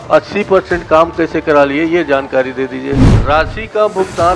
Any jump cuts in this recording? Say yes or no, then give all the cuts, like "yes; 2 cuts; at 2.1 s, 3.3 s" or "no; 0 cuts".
yes; 1 cut; at 3.1 s